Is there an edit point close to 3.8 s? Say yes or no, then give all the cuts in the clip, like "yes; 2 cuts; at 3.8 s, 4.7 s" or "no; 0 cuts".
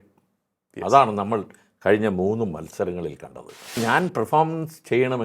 yes; 1 cut; at 3.8 s